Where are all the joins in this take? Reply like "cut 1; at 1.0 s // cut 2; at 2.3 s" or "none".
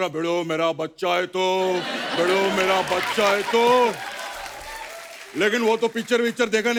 none